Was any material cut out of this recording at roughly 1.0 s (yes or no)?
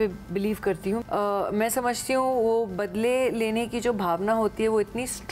yes